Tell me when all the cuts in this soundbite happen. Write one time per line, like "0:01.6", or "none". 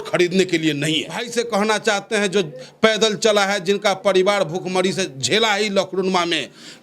0:01.3